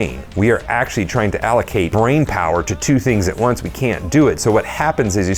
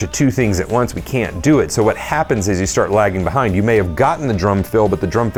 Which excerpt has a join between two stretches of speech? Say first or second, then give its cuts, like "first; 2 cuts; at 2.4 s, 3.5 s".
first; 1 cut; at 1.5 s